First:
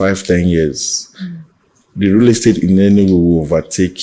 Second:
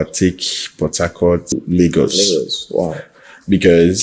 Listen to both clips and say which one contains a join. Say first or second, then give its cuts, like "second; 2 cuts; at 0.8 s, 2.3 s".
second; 1 cut; at 1.5 s